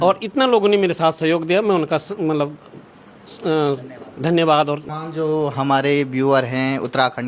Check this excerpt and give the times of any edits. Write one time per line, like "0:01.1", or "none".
0:04.9